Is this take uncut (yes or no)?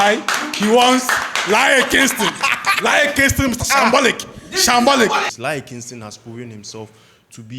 no